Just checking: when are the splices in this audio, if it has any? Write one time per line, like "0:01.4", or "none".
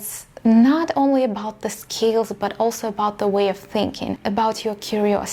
none